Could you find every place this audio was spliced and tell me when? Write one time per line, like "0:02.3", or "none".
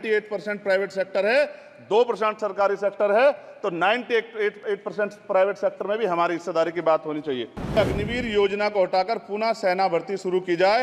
0:07.8